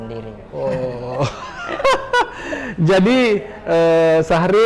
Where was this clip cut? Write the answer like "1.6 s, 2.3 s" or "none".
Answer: none